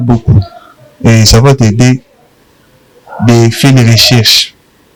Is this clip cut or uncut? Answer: uncut